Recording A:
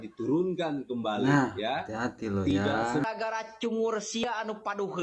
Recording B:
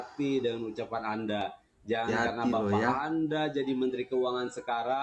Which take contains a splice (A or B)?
A